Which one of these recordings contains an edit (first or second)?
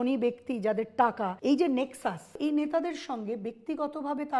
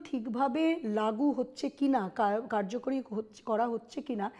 first